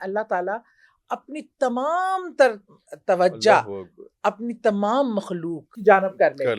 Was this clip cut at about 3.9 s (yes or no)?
no